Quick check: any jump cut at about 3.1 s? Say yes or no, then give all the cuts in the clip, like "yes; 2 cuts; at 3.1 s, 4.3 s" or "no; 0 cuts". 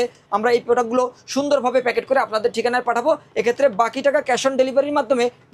no; 0 cuts